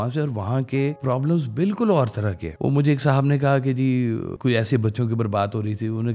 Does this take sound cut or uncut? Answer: cut